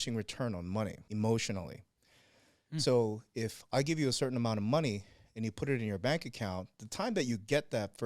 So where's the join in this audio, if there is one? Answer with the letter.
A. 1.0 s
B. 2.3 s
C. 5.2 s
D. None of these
A